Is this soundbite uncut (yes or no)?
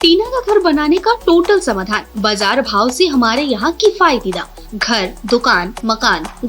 yes